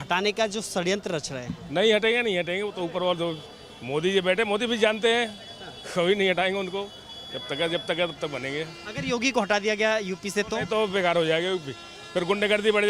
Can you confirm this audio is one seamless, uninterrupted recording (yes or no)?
yes